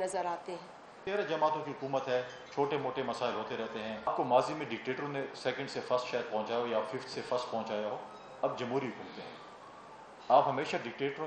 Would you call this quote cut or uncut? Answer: cut